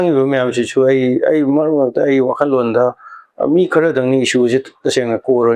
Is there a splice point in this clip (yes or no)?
no